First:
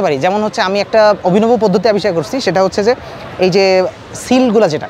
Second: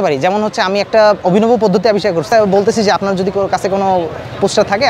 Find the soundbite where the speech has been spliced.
second; 1 cut; at 2.3 s

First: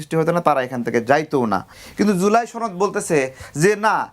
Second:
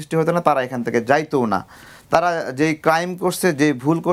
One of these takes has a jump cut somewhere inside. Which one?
first; 1 cut; at 1.8 s

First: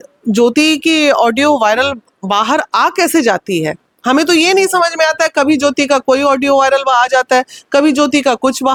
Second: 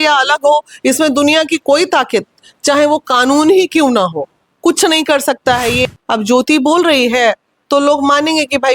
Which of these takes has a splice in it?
second; 1 cut; at 5.8 s

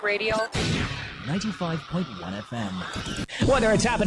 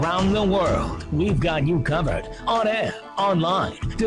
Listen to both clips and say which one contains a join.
first; 1 cut; at 3.1 s

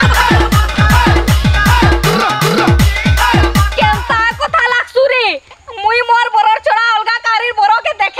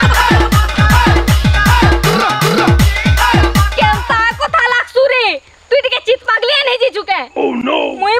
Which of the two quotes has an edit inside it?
first; 1 cut; at 5.6 s

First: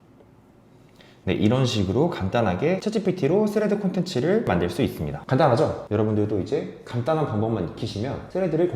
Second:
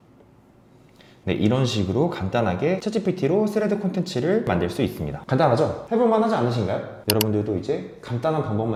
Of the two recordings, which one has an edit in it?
first; 1 cut; at 5.8 s

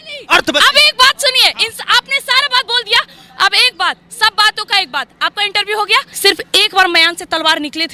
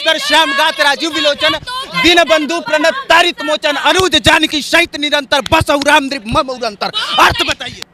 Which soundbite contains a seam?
first; 1 cut; at 6.1 s

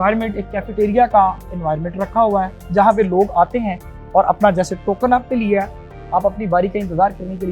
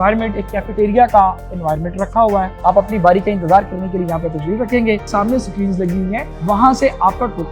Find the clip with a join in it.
second; 2 cuts; at 2.5 s, 5.1 s

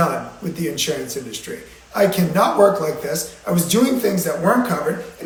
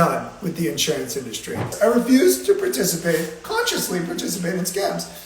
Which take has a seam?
second; 1 cut; at 1.7 s

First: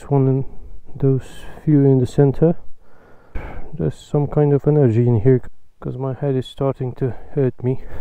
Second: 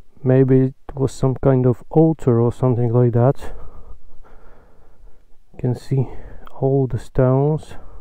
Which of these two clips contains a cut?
first; 1 cut; at 5.4 s

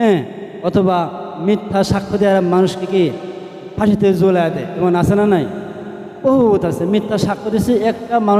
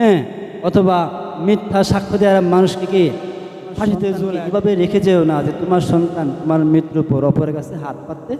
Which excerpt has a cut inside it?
second; 1 cut; at 4.4 s

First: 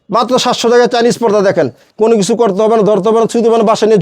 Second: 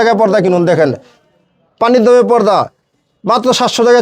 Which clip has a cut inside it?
first; 1 cut; at 1.8 s

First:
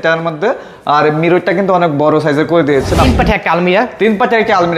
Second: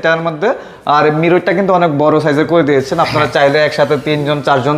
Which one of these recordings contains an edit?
first; 1 cut; at 3.1 s

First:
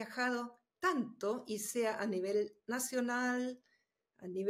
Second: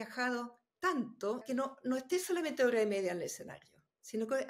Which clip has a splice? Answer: second; 1 cut; at 1.4 s

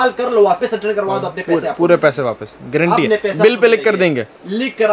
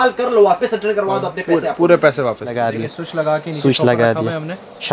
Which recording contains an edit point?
second; 1 cut; at 2.6 s

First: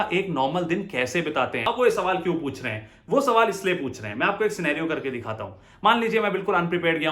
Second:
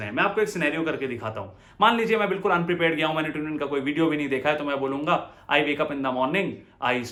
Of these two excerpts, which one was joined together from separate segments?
first; 1 cut; at 1.6 s

